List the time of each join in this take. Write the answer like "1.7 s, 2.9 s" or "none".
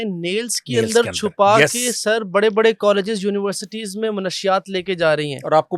none